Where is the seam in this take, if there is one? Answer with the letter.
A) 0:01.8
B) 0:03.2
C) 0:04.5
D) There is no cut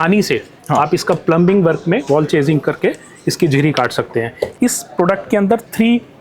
C